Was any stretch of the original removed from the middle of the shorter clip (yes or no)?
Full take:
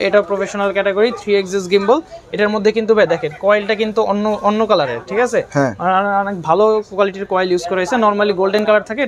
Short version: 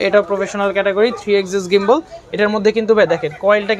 no